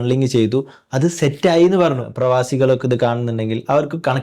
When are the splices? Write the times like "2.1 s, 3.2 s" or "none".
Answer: 2.1 s